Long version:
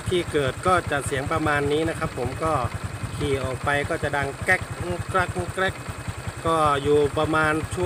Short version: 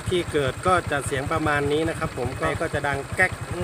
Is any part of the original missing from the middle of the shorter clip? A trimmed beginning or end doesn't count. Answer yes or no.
yes